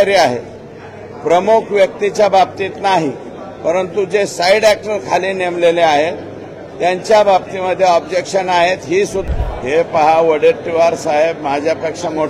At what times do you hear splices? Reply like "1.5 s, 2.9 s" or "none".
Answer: 9.2 s